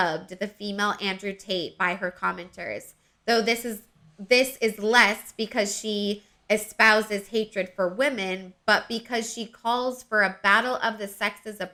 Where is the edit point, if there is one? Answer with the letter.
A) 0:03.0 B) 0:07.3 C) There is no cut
C